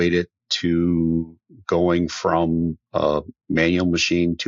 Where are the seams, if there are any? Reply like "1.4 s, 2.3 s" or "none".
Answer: none